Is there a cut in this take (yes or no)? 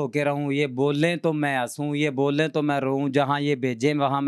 no